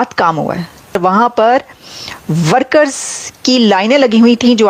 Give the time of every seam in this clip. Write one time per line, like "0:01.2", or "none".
0:00.9